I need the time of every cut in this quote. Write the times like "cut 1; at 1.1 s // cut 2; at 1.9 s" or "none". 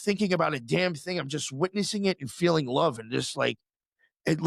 none